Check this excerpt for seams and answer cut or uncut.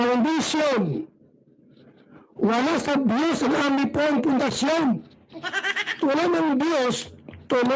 cut